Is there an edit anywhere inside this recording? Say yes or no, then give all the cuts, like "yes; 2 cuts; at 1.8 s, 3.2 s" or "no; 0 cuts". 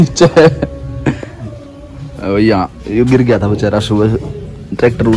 no; 0 cuts